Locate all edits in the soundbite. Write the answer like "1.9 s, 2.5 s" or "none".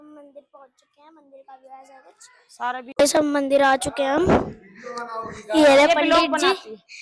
2.9 s